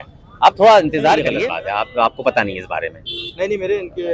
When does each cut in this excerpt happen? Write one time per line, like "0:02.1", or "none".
0:01.3